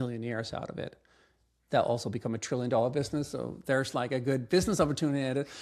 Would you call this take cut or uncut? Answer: uncut